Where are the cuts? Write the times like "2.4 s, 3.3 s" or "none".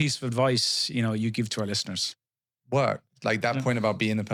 none